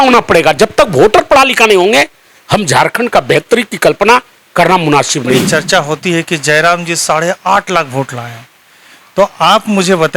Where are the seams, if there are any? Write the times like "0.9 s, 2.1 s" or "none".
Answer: 5.5 s